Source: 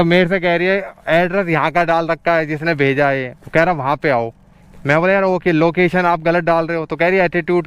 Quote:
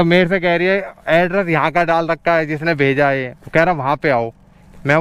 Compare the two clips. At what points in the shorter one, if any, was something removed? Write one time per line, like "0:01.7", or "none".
none